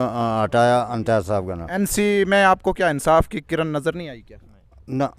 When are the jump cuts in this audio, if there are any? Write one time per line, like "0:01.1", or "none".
0:01.6

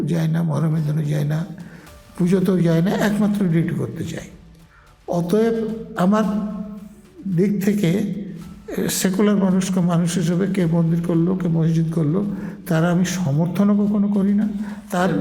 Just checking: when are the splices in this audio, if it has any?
none

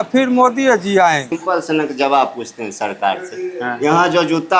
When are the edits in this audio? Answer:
0:01.3

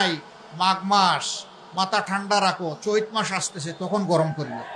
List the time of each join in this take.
none

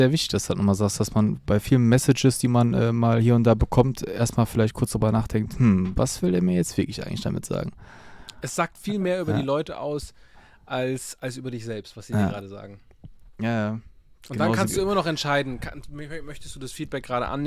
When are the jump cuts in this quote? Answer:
none

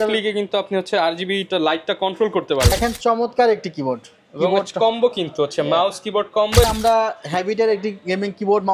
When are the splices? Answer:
0:02.7
0:06.6

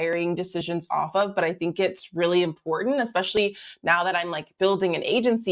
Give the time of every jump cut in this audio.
none

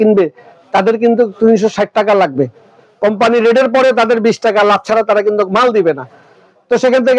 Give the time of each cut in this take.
none

